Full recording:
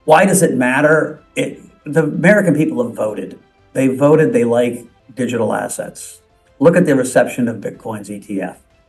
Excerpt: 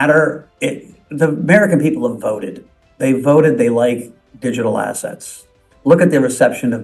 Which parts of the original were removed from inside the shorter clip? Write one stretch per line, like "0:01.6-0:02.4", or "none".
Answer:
none